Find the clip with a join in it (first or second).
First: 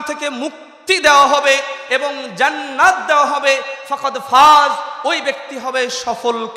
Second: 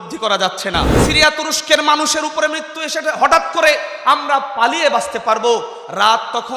second